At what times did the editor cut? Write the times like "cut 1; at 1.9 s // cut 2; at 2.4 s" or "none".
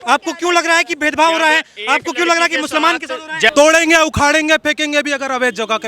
cut 1; at 3.5 s